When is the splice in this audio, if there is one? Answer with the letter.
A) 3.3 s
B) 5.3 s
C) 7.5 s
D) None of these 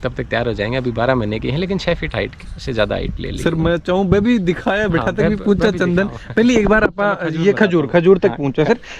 D